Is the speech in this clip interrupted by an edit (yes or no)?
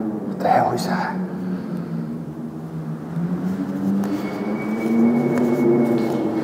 no